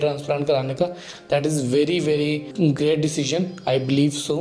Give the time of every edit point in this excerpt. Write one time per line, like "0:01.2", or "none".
0:02.5